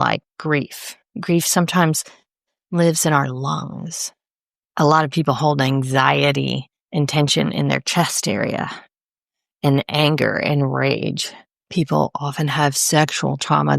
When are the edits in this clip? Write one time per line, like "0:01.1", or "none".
0:11.7